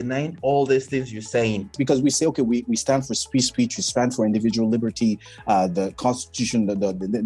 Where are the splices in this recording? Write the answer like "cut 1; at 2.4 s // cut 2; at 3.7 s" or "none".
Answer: cut 1; at 1.7 s